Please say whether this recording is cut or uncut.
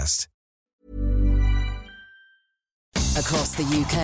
cut